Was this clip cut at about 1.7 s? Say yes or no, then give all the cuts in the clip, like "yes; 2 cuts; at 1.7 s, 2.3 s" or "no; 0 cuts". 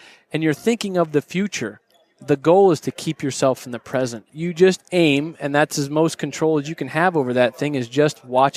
no; 1 cut; at 4.3 s